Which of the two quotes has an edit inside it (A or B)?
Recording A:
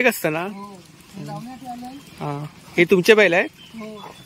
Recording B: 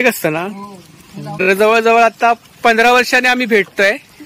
B